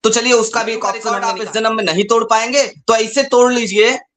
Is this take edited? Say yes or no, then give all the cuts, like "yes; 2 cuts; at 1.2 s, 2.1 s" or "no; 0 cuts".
yes; 1 cut; at 1.0 s